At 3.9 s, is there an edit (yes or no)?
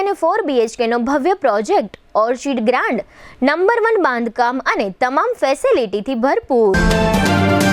no